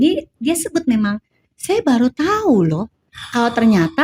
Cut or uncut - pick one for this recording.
uncut